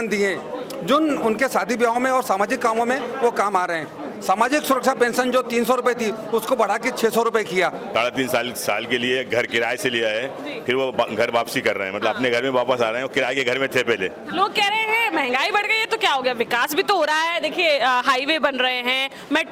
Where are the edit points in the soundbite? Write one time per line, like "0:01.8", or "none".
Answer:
0:07.9
0:14.2

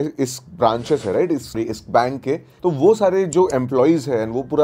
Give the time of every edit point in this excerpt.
0:02.5

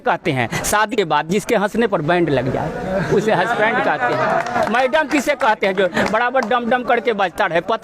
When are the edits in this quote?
0:00.9

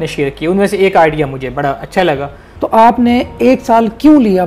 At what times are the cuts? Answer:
0:02.4

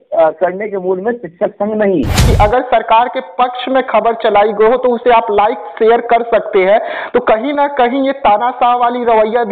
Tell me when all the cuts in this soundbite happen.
0:02.3

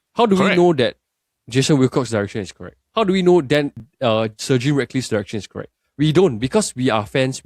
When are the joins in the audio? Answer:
none

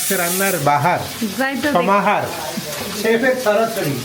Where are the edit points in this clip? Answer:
none

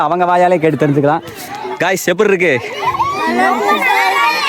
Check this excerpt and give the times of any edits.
none

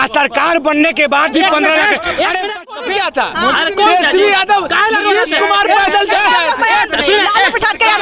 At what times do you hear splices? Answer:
0:02.5

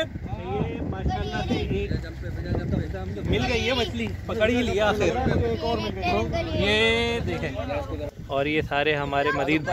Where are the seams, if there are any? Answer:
0:08.1

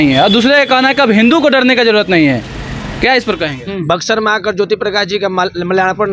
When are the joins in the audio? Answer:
0:03.6

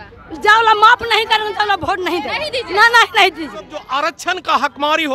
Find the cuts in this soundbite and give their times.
0:03.8

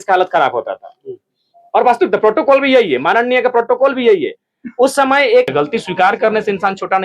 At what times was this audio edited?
0:05.5

